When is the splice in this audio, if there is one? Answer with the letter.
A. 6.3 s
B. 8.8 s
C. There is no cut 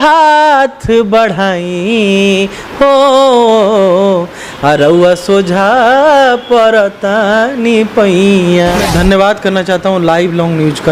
B